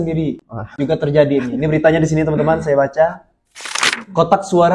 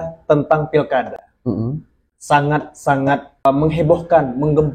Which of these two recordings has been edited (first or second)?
second